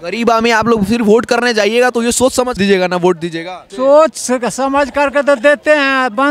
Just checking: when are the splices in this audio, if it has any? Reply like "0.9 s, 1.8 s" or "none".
2.5 s, 3.7 s